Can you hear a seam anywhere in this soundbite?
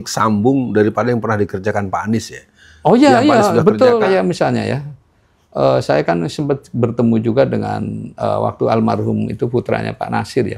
yes; 1 cut; at 4.0 s

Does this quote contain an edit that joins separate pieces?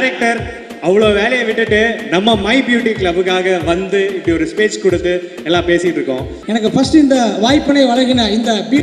yes; 1 cut; at 6.3 s

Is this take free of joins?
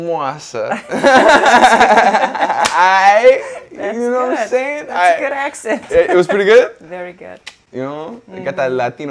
yes; 0 cuts

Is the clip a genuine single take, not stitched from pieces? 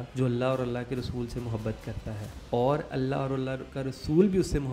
yes; 0 cuts

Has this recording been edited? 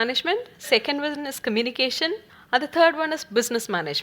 yes; 1 cut; at 2.3 s

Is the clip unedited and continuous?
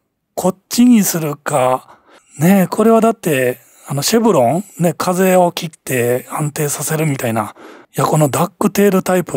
no; 1 cut; at 7.9 s

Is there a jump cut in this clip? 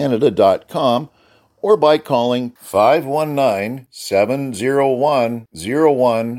no; 0 cuts

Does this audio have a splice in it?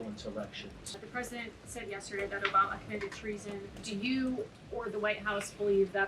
yes; 2 cuts; at 1.0 s, 3.8 s

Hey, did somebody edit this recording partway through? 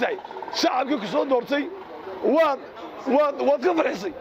no; 0 cuts

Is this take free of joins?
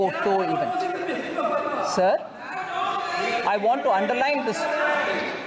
yes; 0 cuts

